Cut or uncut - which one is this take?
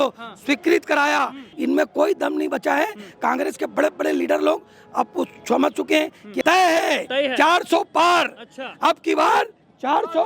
cut